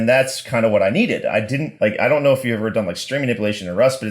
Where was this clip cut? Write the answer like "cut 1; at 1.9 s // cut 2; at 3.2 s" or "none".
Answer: cut 1; at 1.6 s